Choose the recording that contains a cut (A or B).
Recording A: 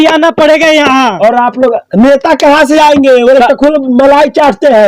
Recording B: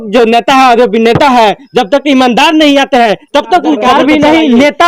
B